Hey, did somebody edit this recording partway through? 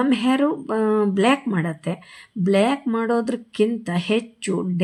no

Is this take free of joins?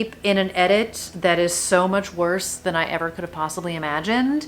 yes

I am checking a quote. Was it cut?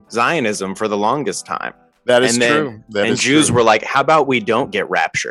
no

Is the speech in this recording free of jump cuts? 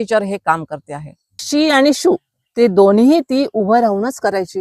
no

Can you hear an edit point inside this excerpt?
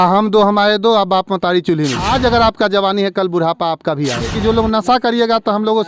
yes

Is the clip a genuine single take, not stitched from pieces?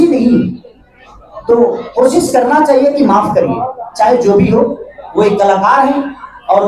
yes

